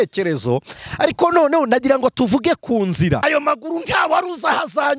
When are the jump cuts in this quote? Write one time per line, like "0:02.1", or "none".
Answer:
0:03.2